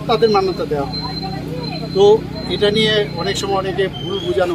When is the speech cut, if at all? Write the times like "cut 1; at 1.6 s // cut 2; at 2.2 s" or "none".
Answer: none